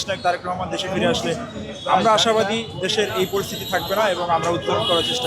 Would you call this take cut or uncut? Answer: uncut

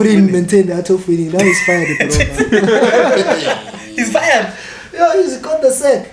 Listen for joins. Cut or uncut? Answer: uncut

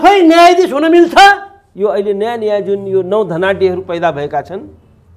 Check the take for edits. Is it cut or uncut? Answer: cut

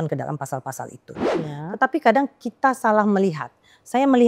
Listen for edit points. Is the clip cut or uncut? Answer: cut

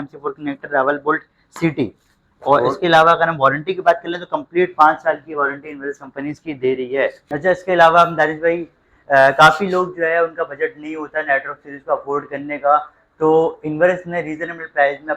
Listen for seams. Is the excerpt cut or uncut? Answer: cut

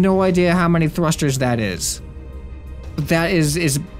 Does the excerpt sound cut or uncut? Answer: uncut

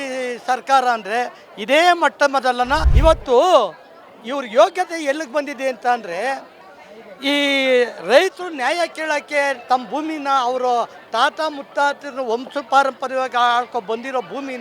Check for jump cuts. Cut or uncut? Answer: cut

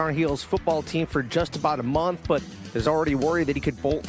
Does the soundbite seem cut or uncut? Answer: uncut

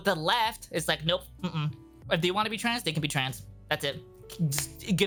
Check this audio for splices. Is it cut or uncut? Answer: uncut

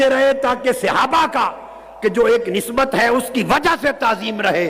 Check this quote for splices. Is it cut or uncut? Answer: uncut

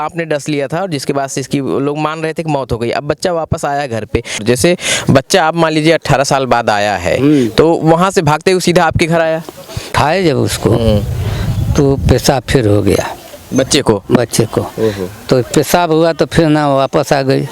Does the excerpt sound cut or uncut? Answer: cut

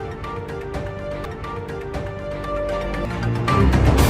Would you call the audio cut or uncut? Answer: cut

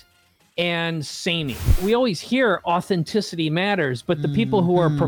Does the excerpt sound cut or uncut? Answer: cut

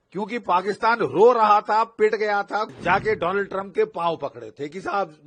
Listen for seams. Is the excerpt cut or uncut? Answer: cut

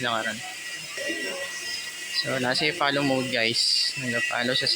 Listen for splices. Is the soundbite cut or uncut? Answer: cut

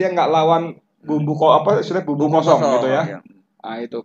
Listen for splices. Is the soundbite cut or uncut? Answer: uncut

